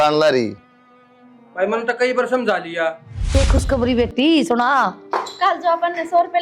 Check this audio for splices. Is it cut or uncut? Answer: cut